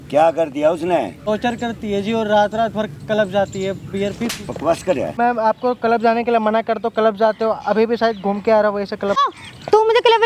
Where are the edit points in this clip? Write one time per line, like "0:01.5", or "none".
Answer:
0:01.2
0:05.2
0:09.2